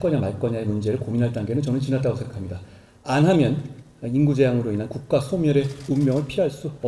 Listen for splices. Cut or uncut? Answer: cut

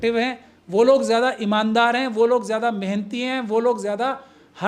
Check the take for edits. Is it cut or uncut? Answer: uncut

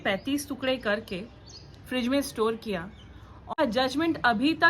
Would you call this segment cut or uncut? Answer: cut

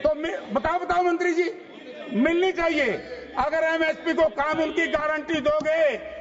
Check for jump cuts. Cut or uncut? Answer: uncut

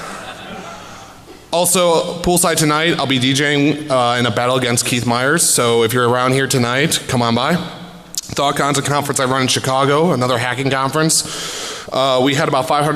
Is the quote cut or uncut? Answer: cut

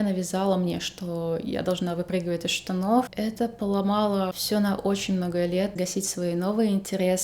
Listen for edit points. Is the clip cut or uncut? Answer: cut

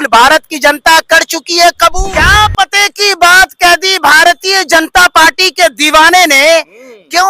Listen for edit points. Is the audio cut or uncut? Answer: cut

